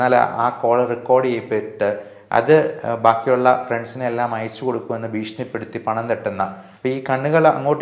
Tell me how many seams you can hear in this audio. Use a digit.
1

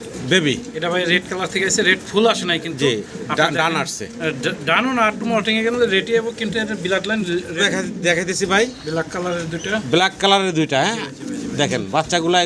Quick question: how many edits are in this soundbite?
1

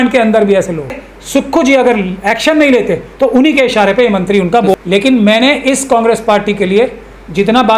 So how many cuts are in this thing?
2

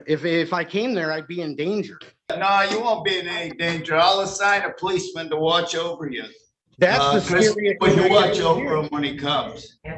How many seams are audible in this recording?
1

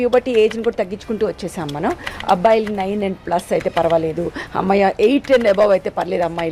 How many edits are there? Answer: 0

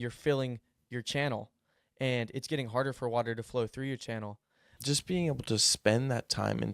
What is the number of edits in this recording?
1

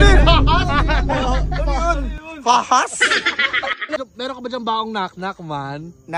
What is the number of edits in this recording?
1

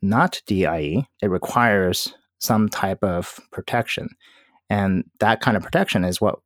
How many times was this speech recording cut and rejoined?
1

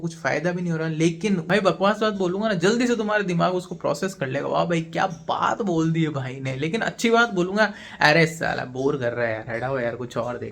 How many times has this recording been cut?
1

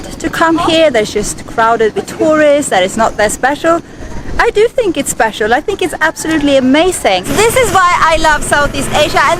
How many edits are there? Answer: 1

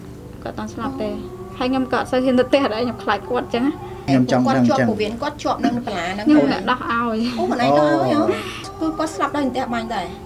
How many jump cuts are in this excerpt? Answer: 2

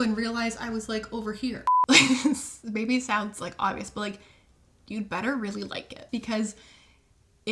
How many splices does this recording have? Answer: 2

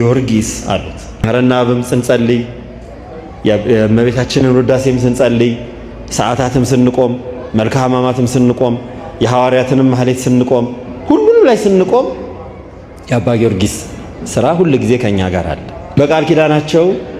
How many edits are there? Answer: 2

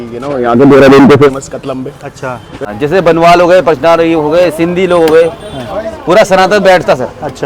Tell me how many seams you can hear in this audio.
1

